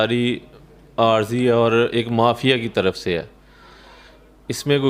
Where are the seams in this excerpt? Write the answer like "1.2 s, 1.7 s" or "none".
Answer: none